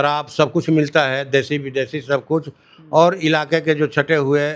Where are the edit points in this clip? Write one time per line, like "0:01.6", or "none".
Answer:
none